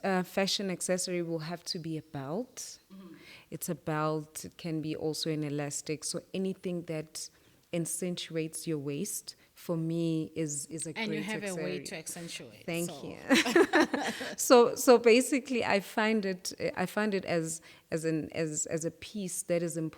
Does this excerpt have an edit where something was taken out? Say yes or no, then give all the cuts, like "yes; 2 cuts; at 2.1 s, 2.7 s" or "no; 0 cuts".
no; 0 cuts